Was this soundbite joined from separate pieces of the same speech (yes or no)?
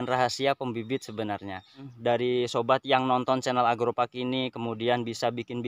yes